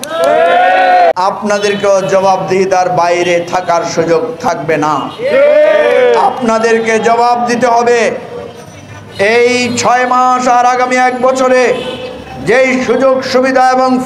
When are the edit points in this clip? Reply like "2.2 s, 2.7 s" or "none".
1.1 s